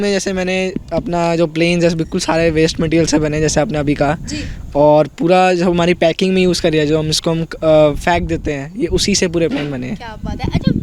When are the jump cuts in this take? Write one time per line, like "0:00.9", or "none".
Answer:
none